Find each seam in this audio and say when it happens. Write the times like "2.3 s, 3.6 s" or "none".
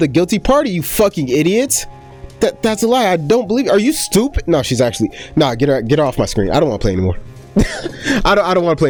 none